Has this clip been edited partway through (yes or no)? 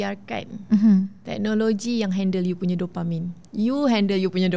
no